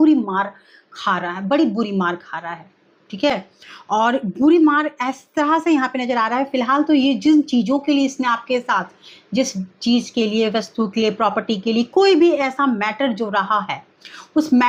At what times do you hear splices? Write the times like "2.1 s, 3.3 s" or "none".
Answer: none